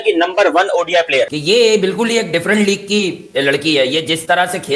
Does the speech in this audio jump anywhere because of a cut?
yes; 1 cut; at 1.4 s

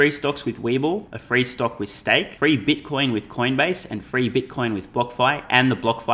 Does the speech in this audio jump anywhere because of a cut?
yes; 2 cuts; at 1.1 s, 2.3 s

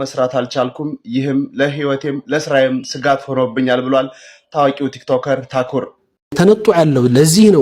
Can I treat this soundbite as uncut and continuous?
no; 1 cut; at 6.0 s

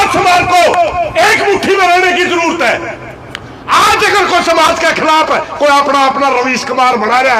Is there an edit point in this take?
no; 0 cuts

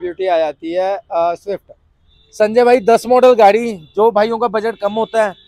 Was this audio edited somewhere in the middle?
no; 0 cuts

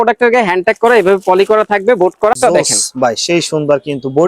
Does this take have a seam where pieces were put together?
yes; 1 cut; at 2.3 s

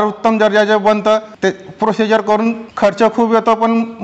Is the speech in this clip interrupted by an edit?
yes; 2 cuts; at 1.3 s, 2.7 s

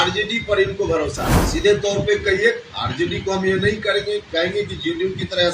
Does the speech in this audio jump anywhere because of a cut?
yes; 1 cut; at 1.3 s

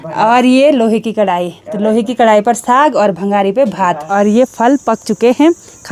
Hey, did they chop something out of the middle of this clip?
yes; 1 cut; at 4.0 s

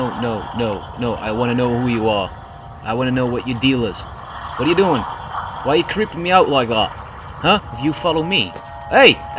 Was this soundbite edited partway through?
yes; 2 cuts; at 7.7 s, 8.5 s

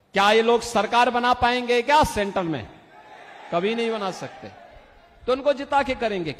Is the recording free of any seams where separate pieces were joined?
yes; 0 cuts

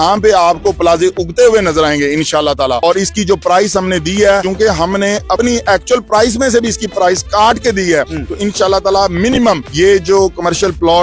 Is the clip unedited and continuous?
yes; 0 cuts

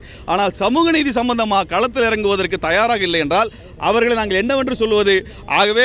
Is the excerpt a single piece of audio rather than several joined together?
yes; 0 cuts

